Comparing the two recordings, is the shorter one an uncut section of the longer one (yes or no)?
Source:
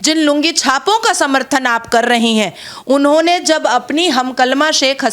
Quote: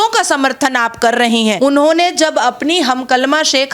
no